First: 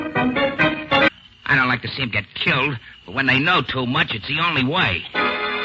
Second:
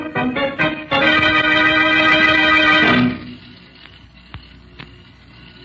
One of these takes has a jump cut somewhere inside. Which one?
second; 1 cut; at 1.1 s

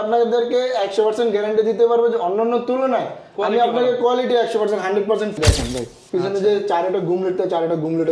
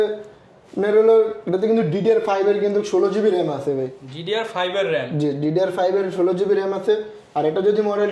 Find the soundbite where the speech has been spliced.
first; 1 cut; at 5.4 s

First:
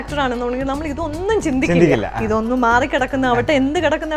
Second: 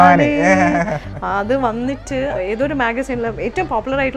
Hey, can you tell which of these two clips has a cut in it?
second; 1 cut; at 2.3 s

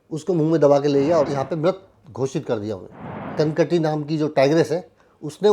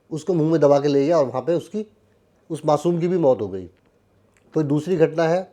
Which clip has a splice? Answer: first; 2 cuts; at 1.3 s, 3.3 s

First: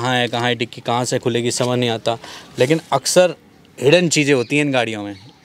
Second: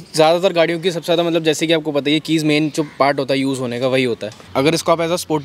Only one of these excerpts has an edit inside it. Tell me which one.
second; 1 cut; at 4.4 s

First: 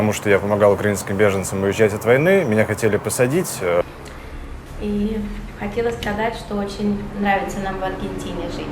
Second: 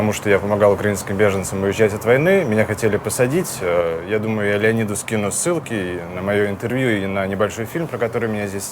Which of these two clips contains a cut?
first; 1 cut; at 3.8 s

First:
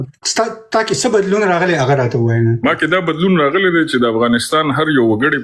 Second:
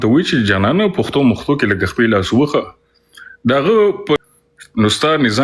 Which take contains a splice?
second; 1 cut; at 4.2 s

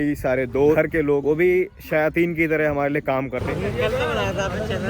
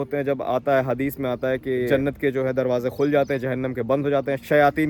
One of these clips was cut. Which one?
first; 2 cuts; at 1.0 s, 3.4 s

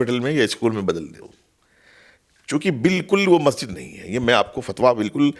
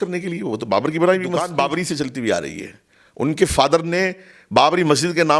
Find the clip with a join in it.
second; 1 cut; at 1.5 s

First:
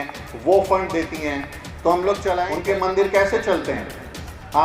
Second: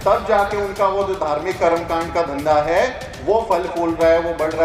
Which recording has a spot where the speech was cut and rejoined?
first; 1 cut; at 2.6 s

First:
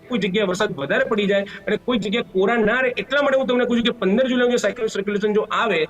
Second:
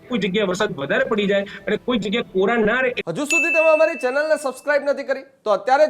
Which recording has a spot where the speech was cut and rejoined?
second; 1 cut; at 3.0 s

